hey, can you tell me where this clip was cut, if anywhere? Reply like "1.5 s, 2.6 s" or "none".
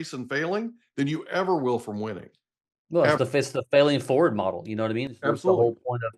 none